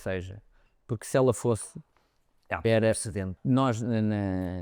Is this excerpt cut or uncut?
cut